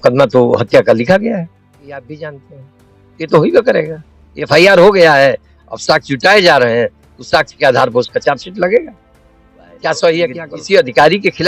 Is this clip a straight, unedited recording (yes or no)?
no